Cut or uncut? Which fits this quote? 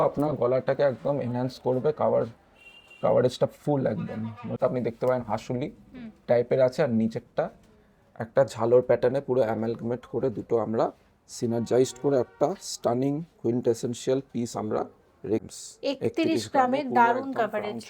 cut